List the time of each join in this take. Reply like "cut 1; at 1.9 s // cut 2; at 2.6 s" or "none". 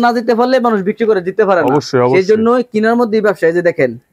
none